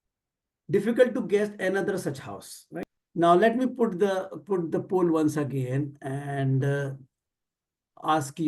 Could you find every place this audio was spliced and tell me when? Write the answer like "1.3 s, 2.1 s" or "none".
2.8 s